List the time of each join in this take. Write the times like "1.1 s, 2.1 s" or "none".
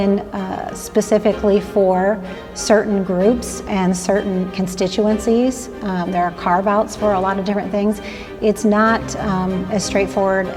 none

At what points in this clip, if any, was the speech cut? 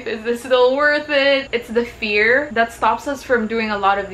1.5 s

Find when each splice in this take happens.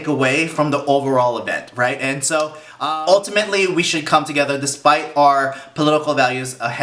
2.8 s

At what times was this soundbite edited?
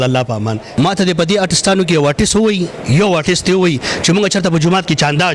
0.9 s

